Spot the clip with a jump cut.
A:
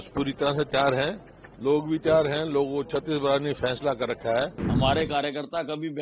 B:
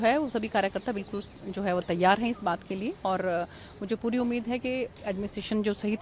A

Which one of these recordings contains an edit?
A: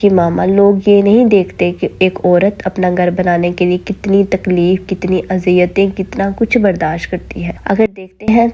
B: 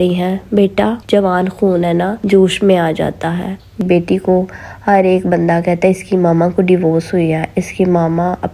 B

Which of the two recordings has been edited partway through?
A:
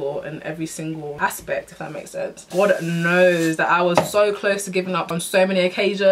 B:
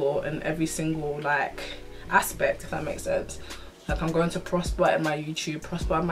A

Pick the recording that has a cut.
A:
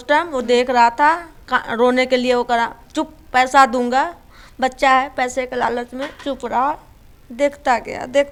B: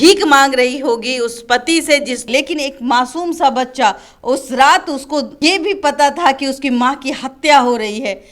B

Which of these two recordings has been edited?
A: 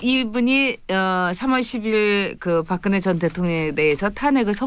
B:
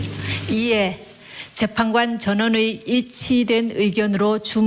A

